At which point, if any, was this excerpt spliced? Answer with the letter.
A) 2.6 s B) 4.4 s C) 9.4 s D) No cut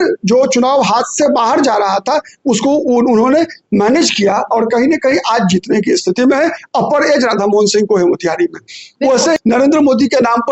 C